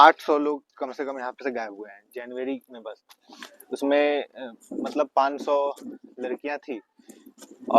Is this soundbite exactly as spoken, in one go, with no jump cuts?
yes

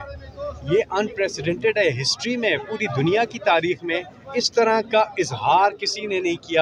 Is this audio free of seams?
yes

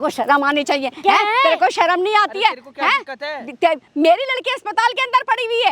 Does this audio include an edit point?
no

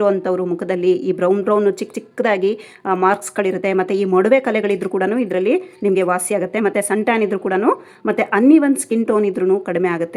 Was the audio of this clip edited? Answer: no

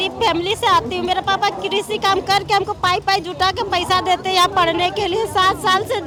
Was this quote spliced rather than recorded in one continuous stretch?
no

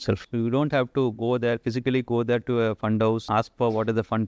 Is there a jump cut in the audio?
yes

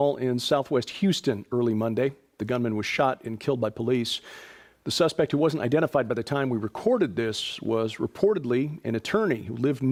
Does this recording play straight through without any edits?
yes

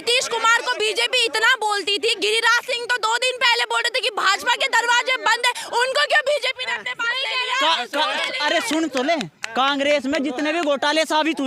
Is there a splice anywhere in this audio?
no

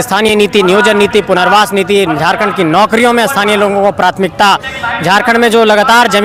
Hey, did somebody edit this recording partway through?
no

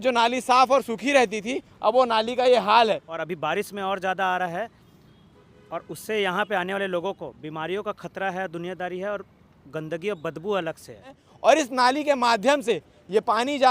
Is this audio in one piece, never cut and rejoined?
no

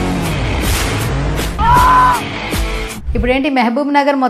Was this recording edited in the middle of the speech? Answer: yes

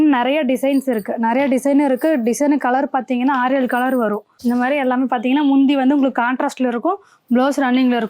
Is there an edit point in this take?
yes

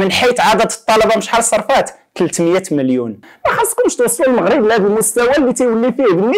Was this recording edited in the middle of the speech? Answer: yes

